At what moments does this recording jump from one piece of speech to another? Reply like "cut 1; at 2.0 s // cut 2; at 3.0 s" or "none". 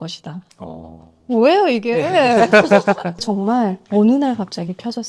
cut 1; at 3.3 s